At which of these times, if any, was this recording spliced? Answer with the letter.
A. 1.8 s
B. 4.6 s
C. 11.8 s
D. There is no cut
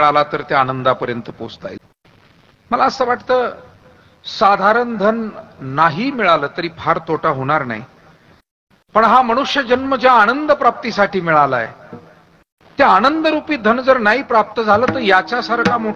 A